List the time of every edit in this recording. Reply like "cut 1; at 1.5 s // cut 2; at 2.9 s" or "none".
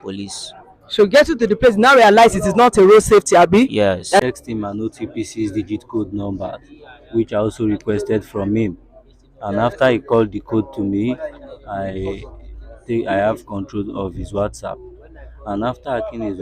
cut 1; at 4.3 s

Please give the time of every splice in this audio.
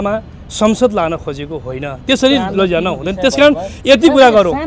none

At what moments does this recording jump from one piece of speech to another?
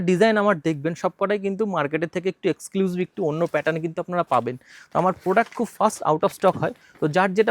none

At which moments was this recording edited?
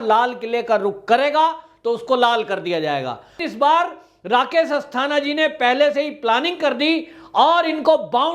cut 1; at 3.4 s

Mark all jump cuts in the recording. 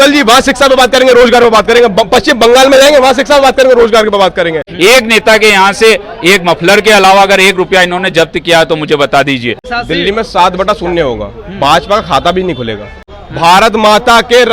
cut 1; at 4.7 s // cut 2; at 9.6 s // cut 3; at 13.2 s

